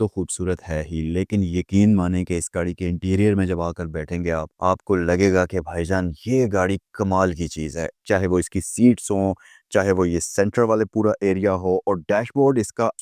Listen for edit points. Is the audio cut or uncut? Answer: uncut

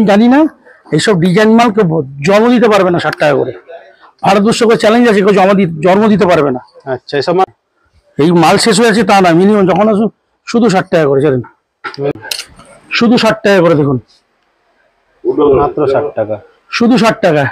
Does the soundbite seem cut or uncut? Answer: cut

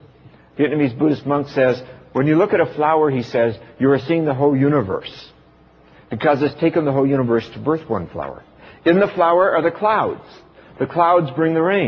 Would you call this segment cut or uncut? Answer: cut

